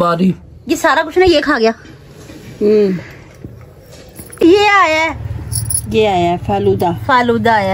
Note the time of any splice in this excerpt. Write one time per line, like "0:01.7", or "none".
0:04.2